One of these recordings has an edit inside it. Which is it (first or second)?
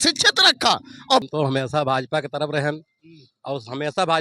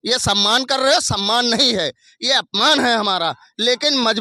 first